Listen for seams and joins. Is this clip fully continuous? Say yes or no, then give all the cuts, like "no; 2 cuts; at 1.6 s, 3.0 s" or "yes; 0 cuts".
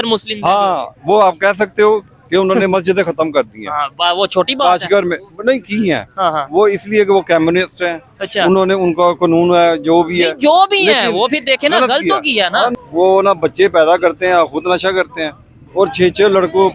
no; 1 cut; at 12.7 s